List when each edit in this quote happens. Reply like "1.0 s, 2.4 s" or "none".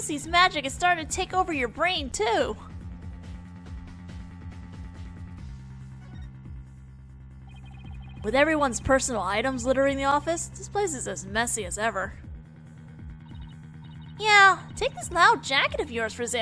none